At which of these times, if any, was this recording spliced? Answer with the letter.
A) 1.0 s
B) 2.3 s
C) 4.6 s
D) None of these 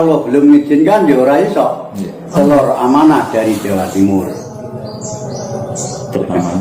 B